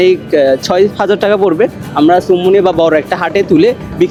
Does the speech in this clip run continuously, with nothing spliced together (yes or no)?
yes